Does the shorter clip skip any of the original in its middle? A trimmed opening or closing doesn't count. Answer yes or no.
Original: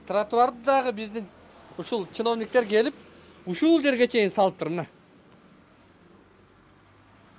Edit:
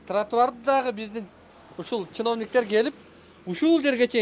no